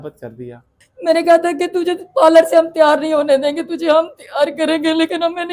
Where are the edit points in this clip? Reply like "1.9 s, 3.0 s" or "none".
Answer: 1.1 s

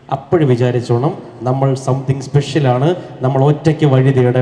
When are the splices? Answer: none

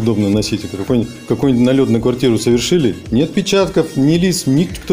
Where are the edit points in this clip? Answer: none

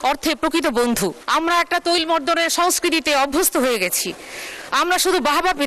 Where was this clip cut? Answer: 1.2 s

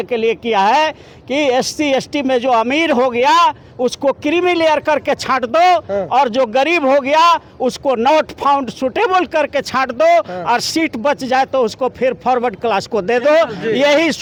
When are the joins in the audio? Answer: none

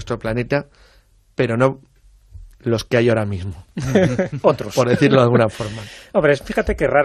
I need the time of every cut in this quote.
5.4 s

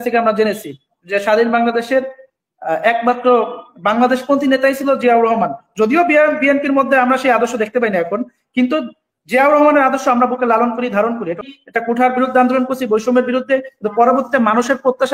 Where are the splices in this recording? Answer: 11.5 s

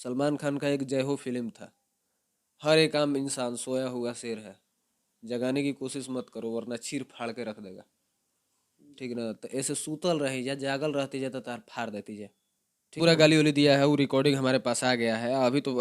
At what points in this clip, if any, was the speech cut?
13.0 s

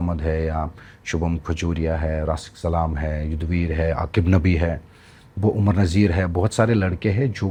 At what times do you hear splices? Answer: none

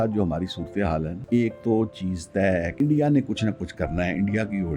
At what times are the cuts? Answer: 1.2 s, 2.7 s

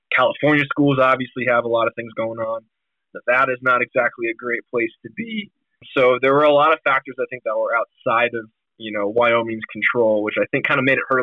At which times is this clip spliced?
5.8 s

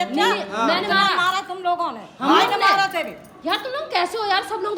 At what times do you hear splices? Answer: none

